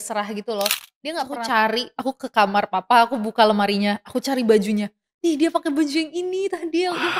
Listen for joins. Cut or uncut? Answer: cut